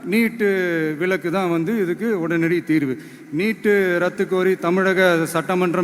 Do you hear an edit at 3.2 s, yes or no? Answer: no